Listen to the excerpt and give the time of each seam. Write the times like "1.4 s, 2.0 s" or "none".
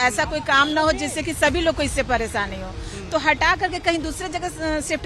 none